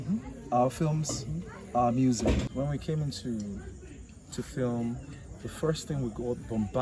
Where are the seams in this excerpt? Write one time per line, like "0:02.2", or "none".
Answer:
0:02.5